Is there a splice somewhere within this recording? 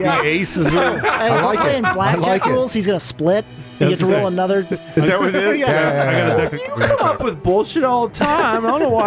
yes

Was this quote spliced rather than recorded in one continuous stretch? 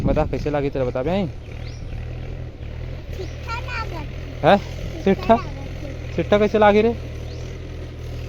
no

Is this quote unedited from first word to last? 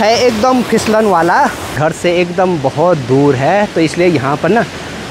no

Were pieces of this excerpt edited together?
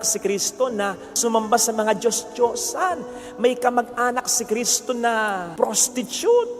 yes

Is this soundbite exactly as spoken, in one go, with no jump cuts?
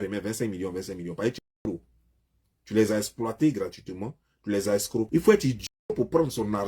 no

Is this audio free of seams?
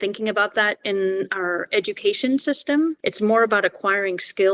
no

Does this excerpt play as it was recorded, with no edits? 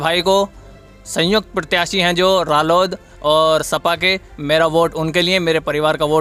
yes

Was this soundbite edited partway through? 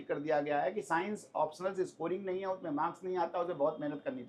no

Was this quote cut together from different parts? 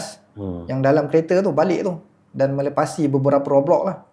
no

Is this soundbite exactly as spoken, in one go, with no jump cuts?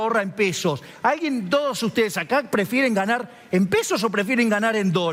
yes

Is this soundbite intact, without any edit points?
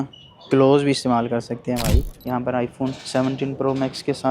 no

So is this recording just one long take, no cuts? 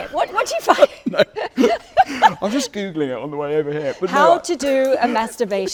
yes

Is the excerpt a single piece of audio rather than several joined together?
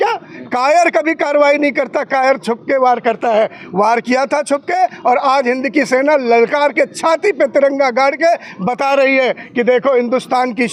yes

